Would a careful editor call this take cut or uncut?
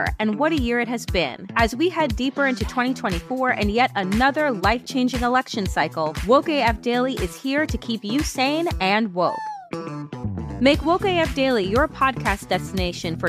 uncut